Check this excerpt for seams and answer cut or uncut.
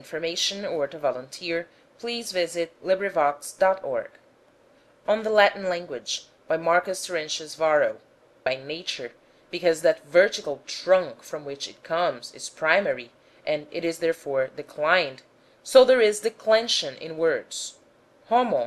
uncut